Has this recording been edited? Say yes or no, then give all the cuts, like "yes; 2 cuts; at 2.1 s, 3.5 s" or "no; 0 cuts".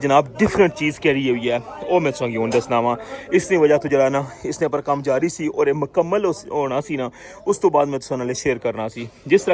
no; 0 cuts